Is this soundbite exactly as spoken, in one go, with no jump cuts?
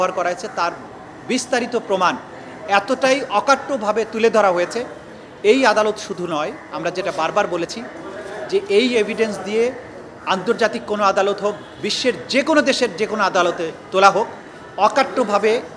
yes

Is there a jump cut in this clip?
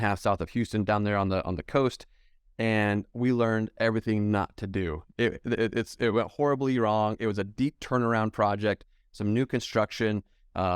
no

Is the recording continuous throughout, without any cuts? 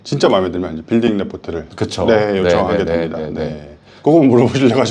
yes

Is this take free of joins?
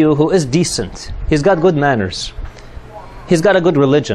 no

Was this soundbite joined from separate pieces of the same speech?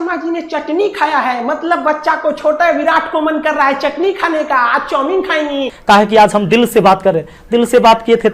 yes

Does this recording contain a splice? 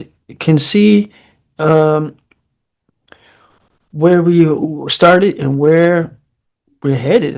no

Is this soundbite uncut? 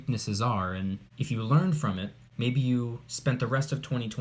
no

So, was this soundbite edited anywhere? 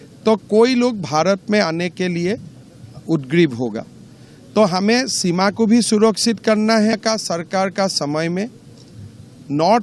yes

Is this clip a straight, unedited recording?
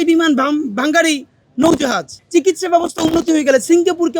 no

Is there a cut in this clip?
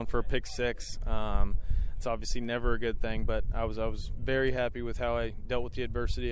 no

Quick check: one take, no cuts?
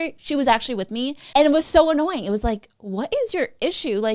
no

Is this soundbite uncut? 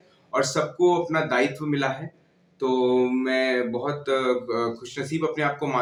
yes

